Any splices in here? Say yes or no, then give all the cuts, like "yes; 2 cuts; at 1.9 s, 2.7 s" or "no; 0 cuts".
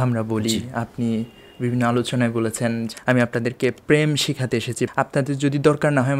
yes; 2 cuts; at 2.9 s, 4.9 s